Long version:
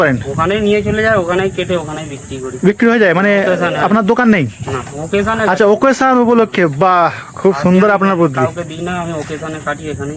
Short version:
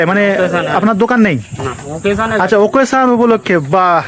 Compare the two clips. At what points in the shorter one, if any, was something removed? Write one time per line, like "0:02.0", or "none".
none